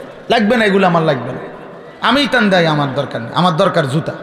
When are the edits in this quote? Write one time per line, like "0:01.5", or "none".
none